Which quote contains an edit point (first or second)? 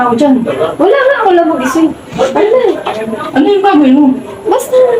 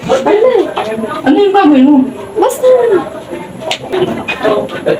second